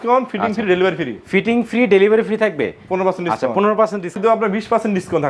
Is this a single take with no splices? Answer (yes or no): no